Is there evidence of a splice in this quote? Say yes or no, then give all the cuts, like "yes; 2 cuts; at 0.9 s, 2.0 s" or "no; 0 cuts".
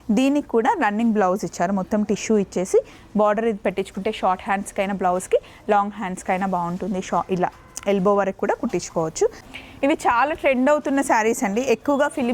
yes; 1 cut; at 9.5 s